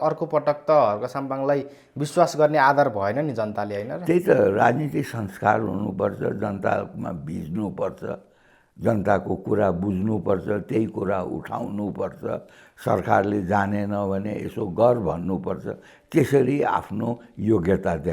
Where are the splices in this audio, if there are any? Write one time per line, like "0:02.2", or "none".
none